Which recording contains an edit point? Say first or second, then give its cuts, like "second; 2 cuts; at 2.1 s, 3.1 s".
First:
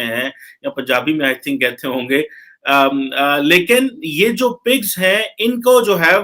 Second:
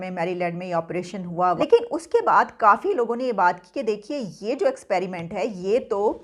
second; 1 cut; at 1.6 s